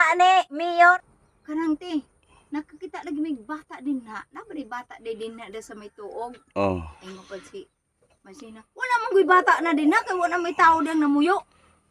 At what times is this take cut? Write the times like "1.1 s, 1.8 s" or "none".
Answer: 1.0 s

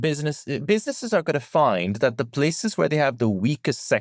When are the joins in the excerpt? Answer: none

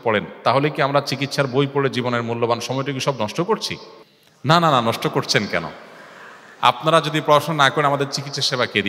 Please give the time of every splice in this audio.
none

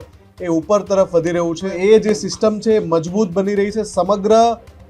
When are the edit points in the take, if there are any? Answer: 1.6 s

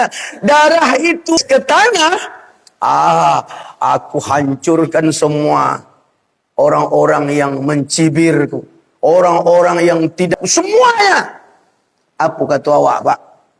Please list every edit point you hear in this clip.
1.4 s, 10.3 s

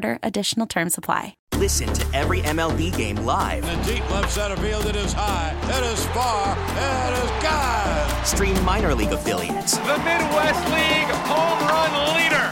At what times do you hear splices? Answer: 1.4 s

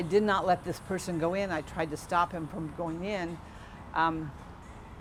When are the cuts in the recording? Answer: none

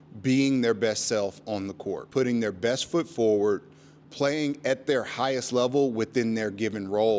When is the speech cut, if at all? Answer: 2.0 s

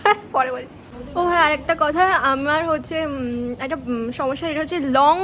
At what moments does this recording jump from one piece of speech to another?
none

